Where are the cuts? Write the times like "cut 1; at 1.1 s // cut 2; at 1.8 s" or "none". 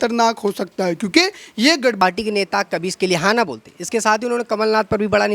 cut 1; at 2.0 s